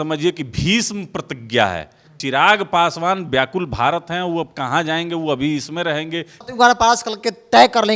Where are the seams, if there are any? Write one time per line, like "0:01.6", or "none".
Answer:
0:02.1
0:06.3